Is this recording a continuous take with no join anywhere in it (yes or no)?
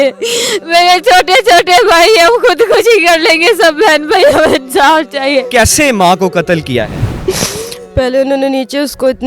no